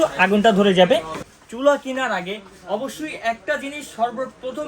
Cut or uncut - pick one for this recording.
cut